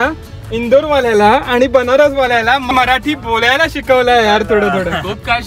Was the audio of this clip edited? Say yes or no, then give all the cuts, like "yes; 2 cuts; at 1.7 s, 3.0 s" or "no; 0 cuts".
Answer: yes; 1 cut; at 2.6 s